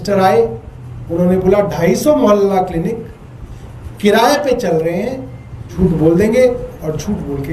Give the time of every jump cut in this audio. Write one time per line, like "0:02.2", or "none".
0:05.7